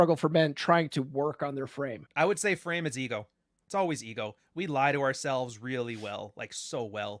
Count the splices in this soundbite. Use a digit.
1